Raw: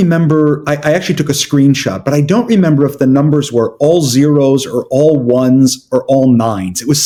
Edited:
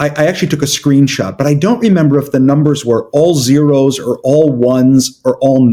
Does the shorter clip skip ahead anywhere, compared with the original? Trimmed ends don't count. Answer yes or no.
no